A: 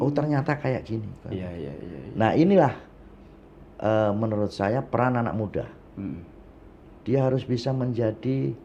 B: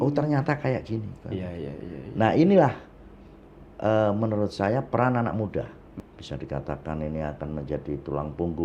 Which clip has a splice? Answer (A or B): B